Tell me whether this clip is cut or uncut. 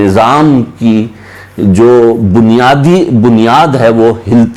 uncut